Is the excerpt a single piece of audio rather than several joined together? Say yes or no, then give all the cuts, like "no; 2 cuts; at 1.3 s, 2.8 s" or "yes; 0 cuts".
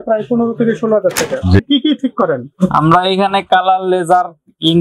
no; 1 cut; at 1.6 s